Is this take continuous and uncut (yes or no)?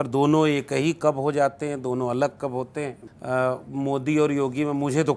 no